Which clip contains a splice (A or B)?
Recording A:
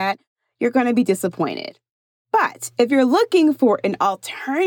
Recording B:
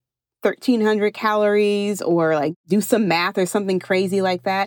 B